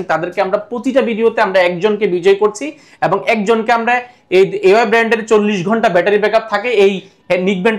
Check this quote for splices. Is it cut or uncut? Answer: uncut